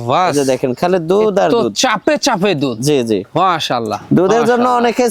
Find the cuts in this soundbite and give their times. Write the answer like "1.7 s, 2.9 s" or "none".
none